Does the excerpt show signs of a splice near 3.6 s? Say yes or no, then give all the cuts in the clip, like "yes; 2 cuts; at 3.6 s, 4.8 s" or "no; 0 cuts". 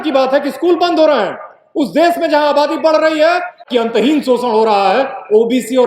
yes; 1 cut; at 3.6 s